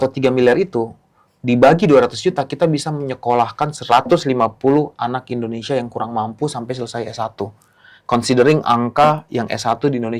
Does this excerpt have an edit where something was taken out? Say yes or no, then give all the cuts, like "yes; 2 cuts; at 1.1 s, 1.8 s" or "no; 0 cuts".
no; 0 cuts